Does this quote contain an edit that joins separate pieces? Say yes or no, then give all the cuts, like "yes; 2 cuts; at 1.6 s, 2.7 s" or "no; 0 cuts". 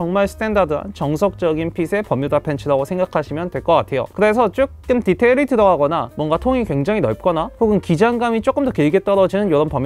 no; 0 cuts